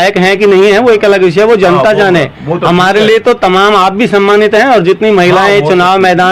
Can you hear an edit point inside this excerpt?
no; 0 cuts

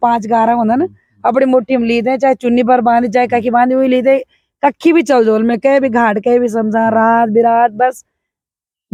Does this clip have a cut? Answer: no; 0 cuts

